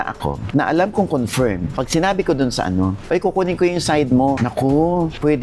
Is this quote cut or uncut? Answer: cut